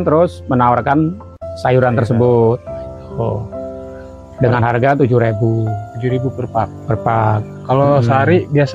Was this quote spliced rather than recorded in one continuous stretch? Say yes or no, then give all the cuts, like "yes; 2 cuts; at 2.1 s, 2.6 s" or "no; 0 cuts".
no; 0 cuts